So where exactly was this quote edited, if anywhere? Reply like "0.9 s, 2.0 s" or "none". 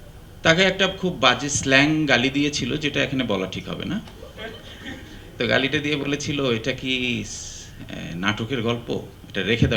none